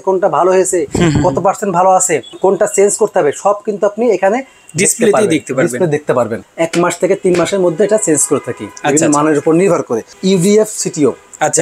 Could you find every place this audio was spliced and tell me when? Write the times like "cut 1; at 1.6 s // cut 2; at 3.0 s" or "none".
cut 1; at 2.3 s // cut 2; at 6.3 s // cut 3; at 10.1 s